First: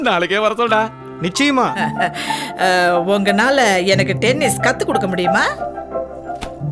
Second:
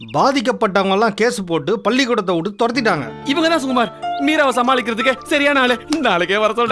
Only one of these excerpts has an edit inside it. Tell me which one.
first; 1 cut; at 1.7 s

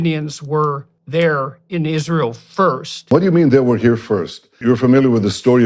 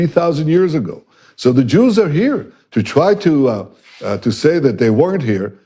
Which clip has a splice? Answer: first; 3 cuts; at 0.9 s, 3.1 s, 4.5 s

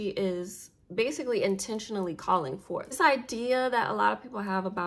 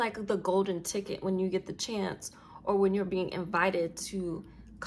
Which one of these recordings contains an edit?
first; 1 cut; at 3.0 s

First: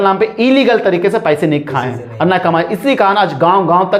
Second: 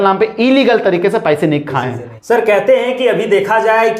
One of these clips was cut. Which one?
second; 1 cut; at 2.0 s

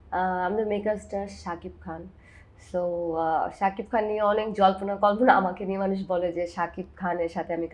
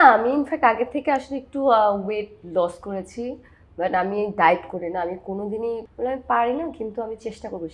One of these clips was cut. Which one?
second; 1 cut; at 5.9 s

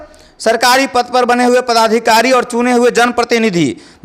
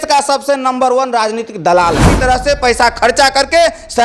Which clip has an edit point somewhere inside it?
second; 1 cut; at 2.1 s

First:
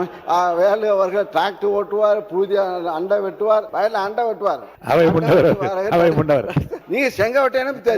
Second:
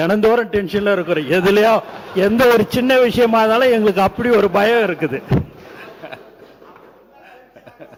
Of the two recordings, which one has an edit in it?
first; 3 cuts; at 3.7 s, 4.7 s, 6.8 s

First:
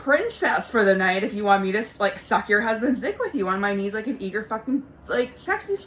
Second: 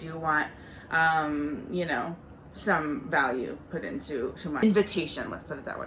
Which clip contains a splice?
second; 1 cut; at 4.6 s

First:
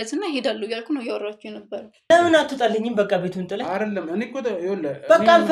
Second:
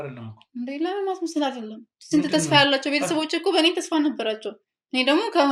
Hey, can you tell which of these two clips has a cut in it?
first; 1 cut; at 2.1 s

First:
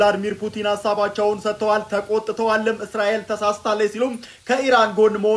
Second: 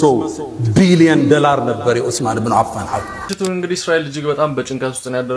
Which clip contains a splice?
second; 1 cut; at 3.2 s

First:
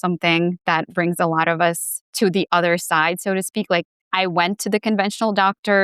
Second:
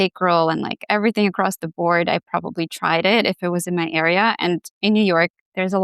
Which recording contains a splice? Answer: first; 1 cut; at 4.0 s

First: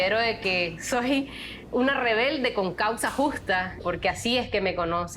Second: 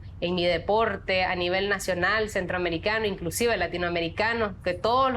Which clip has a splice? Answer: first; 2 cuts; at 1.1 s, 3.8 s

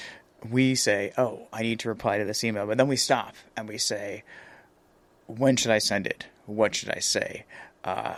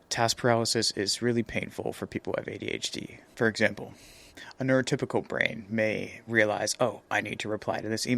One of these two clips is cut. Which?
second; 1 cut; at 3.2 s

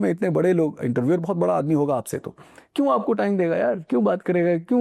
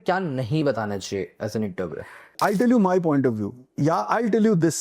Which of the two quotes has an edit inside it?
second; 1 cut; at 2.4 s

